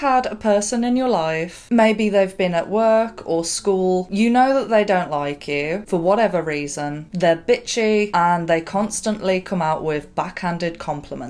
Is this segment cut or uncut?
uncut